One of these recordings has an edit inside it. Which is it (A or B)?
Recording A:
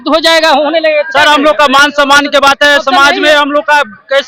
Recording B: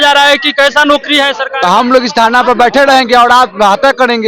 B